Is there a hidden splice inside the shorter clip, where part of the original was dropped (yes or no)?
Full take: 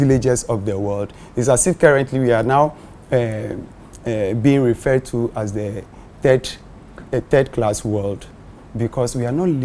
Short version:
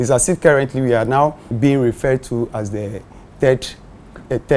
yes